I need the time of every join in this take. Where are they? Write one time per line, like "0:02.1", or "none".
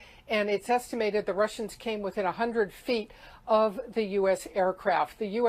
0:02.5